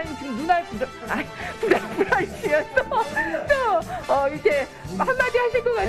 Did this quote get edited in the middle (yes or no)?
no